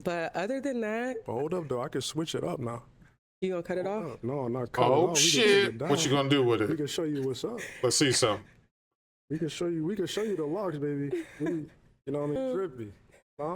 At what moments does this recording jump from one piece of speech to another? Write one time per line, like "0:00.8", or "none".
0:12.4